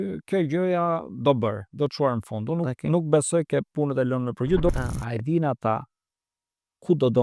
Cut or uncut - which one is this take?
cut